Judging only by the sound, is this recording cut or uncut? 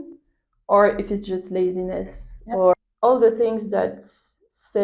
cut